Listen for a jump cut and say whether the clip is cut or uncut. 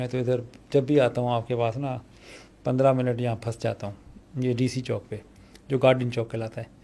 uncut